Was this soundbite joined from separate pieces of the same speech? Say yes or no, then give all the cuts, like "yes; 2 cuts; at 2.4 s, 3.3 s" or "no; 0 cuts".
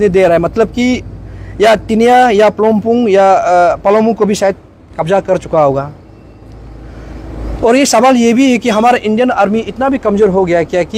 no; 0 cuts